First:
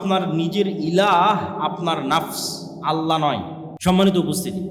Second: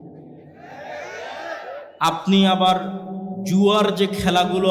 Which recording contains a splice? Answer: first; 1 cut; at 3.7 s

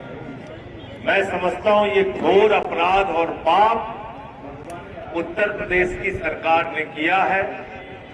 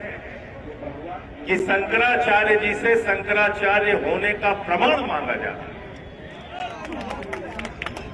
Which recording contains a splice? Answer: second; 1 cut; at 6.5 s

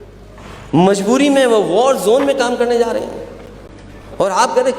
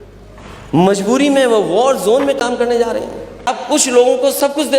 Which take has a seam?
second; 1 cut; at 3.5 s

